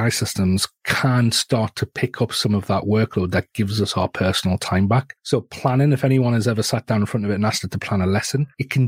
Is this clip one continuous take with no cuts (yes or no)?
yes